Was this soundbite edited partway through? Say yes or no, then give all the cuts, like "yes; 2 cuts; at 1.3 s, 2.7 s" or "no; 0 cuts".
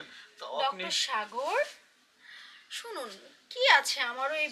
no; 0 cuts